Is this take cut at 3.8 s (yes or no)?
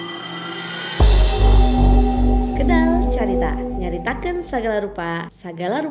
yes